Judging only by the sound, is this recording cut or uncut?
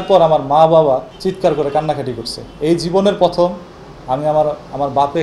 uncut